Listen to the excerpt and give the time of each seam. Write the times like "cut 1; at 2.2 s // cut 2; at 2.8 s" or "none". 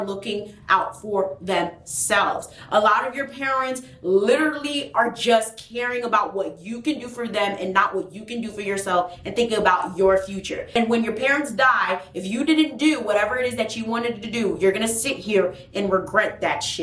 cut 1; at 10.7 s